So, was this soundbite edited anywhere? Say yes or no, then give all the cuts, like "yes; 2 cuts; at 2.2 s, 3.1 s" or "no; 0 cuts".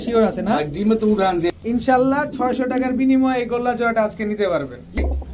yes; 1 cut; at 1.6 s